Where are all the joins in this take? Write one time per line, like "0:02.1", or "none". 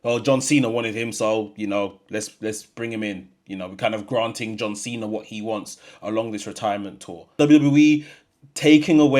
0:07.4